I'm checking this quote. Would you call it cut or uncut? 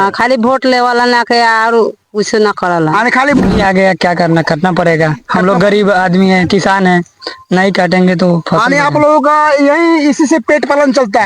cut